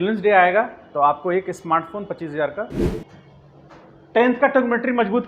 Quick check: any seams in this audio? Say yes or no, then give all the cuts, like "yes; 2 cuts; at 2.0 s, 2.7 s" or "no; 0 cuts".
yes; 1 cut; at 2.8 s